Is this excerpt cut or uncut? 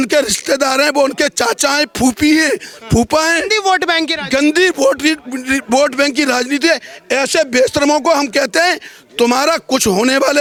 uncut